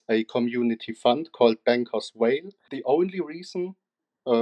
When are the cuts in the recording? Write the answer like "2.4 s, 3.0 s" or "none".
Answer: 2.7 s